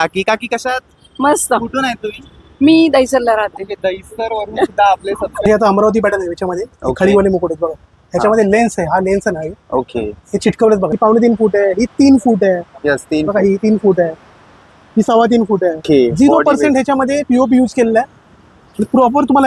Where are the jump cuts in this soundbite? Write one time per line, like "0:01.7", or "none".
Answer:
0:05.4
0:10.9
0:15.8

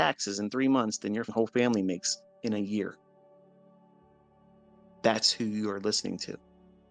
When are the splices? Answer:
0:01.3

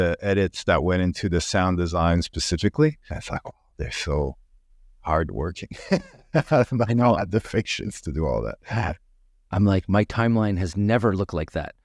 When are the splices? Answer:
0:03.1

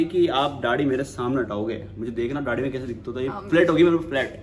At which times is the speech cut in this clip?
none

